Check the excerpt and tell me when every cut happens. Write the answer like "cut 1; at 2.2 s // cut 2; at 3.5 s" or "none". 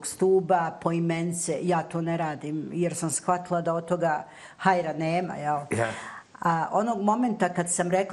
none